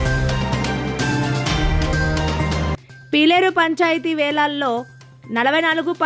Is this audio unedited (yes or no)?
no